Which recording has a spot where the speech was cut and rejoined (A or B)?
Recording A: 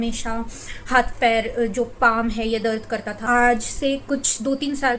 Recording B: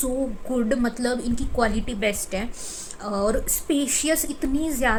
A